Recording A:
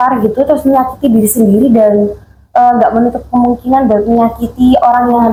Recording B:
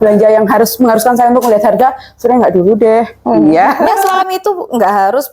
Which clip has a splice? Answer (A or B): B